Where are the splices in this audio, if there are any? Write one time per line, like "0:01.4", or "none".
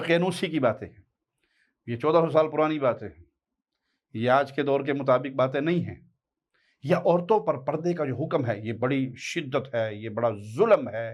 none